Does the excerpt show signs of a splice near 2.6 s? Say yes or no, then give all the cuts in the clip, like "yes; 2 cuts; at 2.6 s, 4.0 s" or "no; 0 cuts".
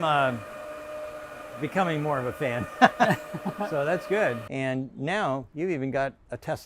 no; 1 cut; at 4.4 s